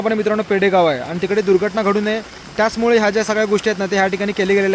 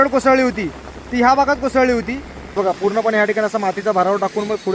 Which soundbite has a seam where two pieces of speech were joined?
second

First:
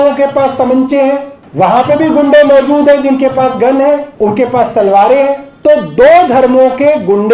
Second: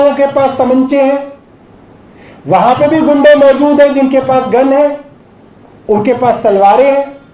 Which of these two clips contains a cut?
first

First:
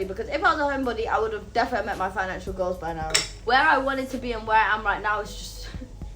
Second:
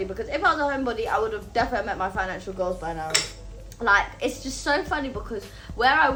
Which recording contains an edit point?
first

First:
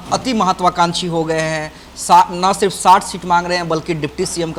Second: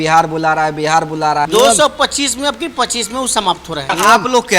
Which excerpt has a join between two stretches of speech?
second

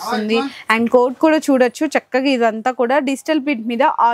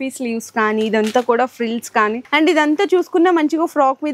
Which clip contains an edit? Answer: second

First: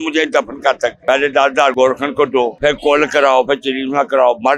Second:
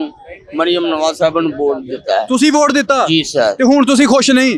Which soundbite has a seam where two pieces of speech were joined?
first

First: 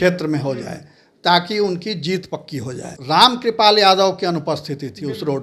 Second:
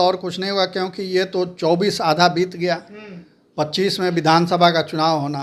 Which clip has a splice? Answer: first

